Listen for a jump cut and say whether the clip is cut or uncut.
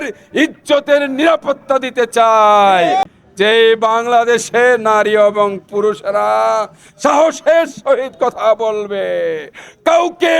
cut